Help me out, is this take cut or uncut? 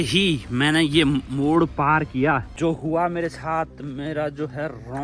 cut